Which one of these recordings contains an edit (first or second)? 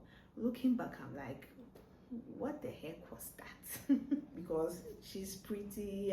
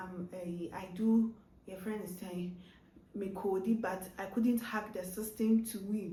first